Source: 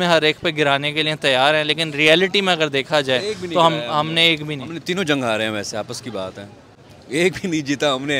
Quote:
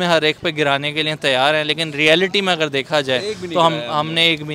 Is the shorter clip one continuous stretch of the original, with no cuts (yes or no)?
yes